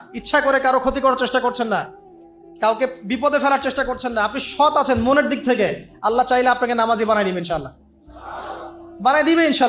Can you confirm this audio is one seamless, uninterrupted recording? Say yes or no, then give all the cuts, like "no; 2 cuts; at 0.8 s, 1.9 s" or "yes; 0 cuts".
yes; 0 cuts